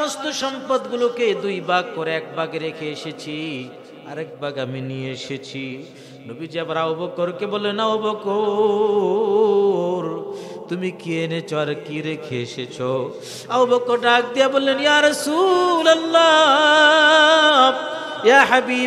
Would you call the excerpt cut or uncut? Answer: uncut